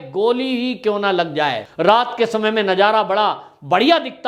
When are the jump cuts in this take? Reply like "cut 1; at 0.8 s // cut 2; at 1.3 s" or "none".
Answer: cut 1; at 1.6 s